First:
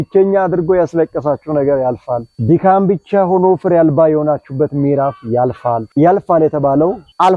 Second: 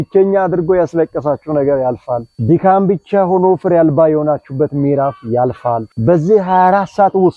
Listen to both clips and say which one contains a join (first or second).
first